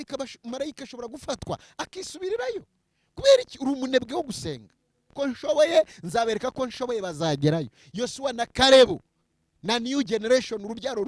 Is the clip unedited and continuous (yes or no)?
no